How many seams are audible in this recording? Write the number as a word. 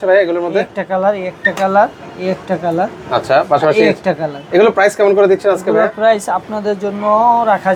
zero